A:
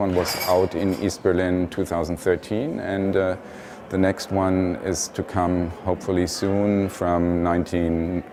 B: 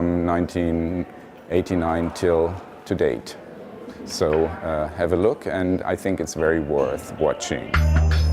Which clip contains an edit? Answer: B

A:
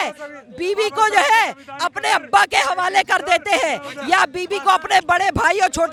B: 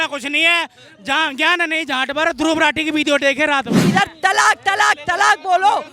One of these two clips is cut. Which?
B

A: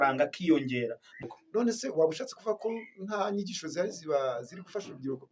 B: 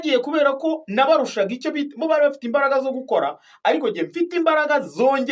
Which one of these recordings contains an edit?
A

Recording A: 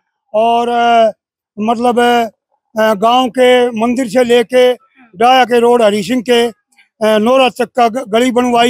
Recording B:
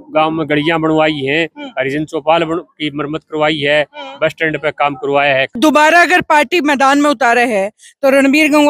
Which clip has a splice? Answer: B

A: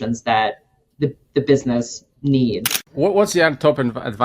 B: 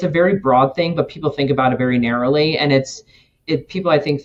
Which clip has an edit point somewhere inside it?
A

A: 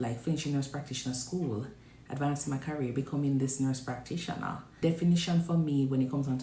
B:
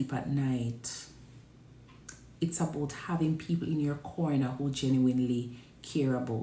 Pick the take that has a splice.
A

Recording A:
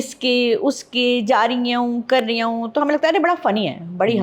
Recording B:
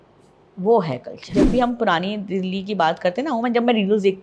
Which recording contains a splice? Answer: B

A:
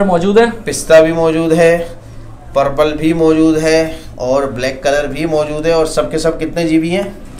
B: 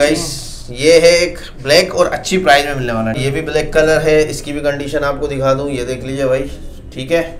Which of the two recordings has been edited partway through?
B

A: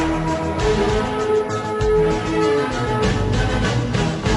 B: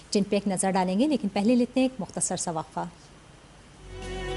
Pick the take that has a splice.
A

